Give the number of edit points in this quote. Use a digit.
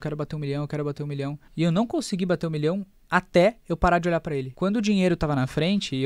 2